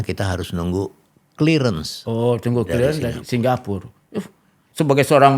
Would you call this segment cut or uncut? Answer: uncut